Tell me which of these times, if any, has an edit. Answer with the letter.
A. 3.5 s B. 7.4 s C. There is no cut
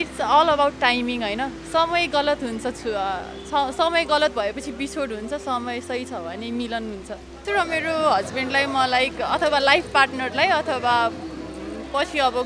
B